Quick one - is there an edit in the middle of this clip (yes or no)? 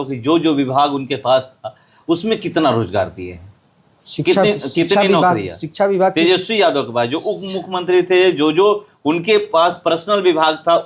no